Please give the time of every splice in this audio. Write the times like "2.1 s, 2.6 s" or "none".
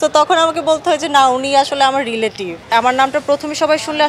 2.7 s